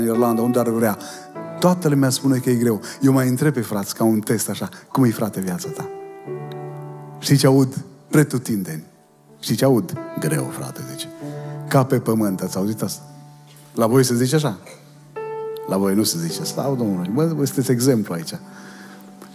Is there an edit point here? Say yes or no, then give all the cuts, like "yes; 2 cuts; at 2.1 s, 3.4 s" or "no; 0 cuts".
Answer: no; 0 cuts